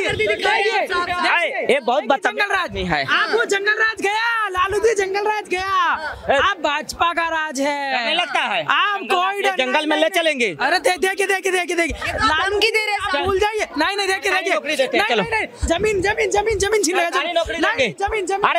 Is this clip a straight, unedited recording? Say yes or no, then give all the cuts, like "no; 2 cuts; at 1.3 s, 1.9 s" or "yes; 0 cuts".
yes; 0 cuts